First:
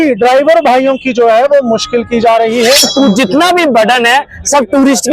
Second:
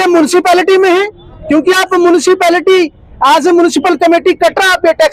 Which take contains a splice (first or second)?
first